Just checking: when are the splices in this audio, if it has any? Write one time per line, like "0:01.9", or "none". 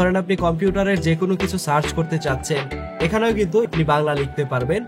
0:03.7